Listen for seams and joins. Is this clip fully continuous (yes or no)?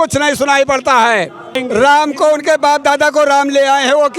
no